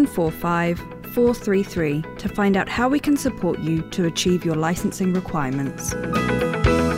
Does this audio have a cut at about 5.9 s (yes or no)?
yes